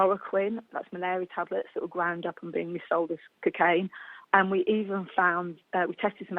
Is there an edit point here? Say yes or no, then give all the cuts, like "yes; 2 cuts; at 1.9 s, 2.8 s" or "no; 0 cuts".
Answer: no; 0 cuts